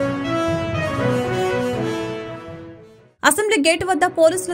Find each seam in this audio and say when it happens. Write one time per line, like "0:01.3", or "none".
0:00.9